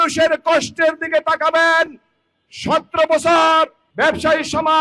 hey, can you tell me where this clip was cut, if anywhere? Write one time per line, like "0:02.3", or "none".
0:03.8